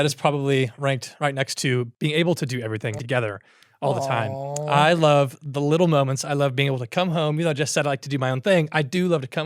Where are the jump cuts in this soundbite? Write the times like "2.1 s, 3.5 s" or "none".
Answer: 1.9 s, 3.0 s